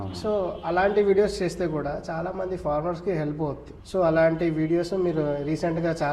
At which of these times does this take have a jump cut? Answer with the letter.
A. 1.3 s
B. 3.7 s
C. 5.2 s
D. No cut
B